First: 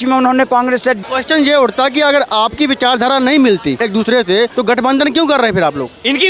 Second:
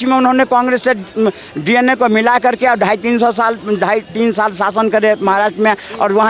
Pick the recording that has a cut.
first; 3 cuts; at 1.0 s, 3.8 s, 4.5 s

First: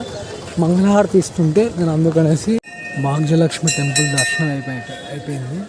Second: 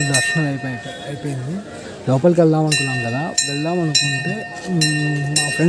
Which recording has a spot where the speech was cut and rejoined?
first; 1 cut; at 2.7 s

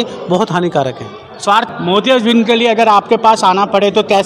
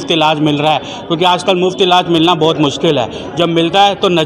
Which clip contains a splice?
first; 1 cut; at 1.7 s

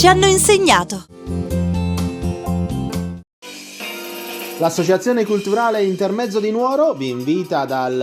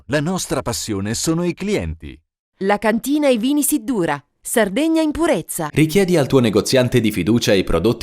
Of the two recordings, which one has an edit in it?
first; 1 cut; at 3.2 s

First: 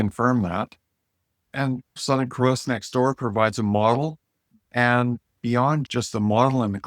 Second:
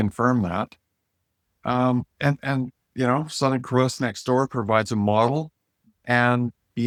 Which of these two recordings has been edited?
first; 2 cuts; at 1.8 s, 5.8 s

